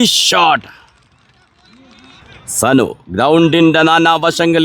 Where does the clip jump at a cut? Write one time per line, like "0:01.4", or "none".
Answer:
0:02.4